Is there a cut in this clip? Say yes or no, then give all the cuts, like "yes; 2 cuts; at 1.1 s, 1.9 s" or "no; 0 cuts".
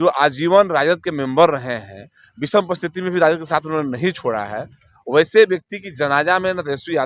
no; 0 cuts